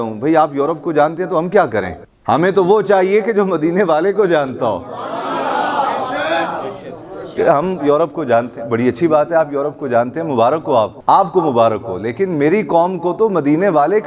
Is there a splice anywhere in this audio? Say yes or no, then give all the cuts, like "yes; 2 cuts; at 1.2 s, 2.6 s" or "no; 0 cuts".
yes; 1 cut; at 11.0 s